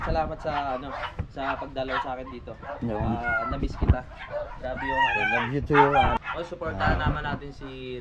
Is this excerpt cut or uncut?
cut